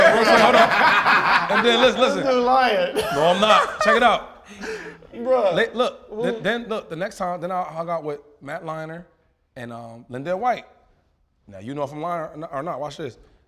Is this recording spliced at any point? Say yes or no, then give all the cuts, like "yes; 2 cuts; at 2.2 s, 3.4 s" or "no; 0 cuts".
no; 0 cuts